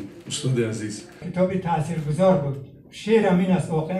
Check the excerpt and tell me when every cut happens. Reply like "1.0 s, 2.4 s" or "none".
1.2 s

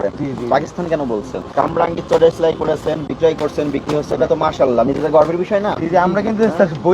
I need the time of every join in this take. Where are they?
1.4 s

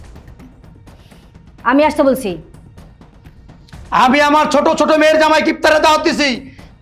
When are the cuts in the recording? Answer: none

